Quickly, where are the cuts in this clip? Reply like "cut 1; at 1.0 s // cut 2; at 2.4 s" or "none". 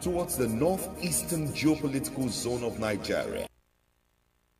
cut 1; at 3.4 s